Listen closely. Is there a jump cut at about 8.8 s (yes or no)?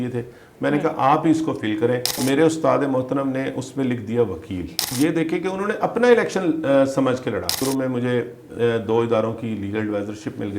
no